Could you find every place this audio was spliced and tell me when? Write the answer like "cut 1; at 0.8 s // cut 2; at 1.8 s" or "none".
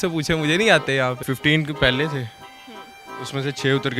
cut 1; at 1.3 s